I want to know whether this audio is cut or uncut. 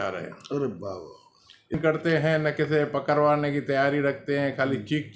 cut